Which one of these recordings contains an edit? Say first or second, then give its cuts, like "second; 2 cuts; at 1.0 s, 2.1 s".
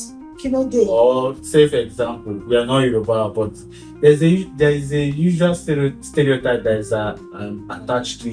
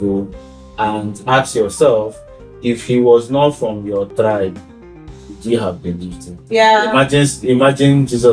second; 1 cut; at 6.4 s